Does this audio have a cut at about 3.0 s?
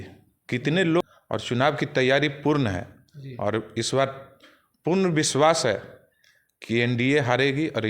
no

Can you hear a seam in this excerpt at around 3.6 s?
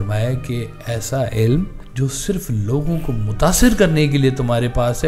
no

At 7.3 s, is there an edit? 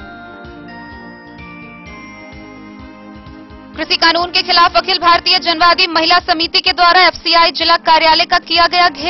no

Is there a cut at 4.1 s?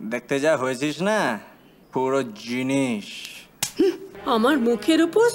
yes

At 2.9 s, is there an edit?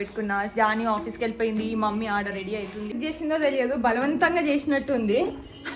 yes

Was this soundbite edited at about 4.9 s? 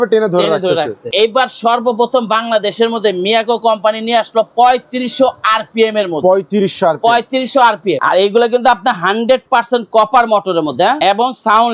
no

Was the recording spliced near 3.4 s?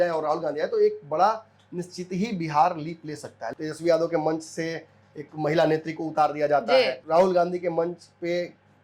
yes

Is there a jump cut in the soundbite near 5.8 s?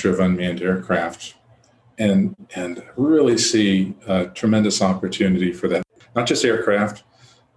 yes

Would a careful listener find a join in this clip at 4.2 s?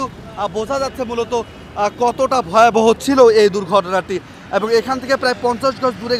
no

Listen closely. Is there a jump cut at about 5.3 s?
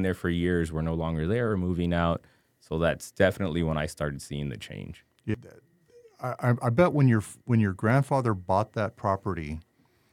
yes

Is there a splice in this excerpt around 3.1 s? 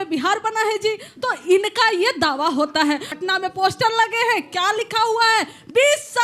yes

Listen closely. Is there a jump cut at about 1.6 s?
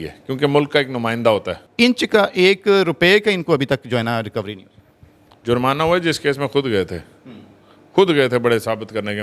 yes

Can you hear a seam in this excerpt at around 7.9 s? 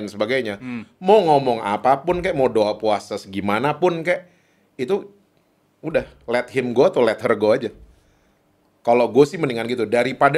no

